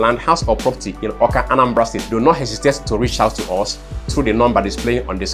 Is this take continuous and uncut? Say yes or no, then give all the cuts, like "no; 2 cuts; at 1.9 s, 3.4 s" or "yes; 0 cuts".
no; 1 cut; at 2.0 s